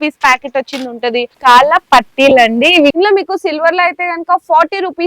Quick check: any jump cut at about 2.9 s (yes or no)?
yes